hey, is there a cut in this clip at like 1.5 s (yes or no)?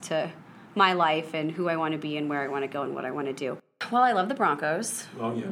no